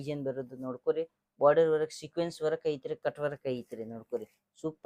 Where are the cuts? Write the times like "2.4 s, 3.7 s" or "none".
none